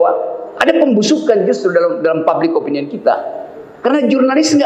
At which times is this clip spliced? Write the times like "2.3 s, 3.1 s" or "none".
none